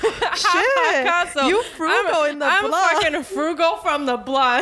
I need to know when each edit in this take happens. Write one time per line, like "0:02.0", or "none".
none